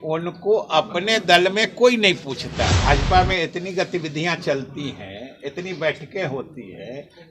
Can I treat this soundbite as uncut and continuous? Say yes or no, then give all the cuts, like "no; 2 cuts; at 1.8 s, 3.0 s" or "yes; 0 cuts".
no; 1 cut; at 2.8 s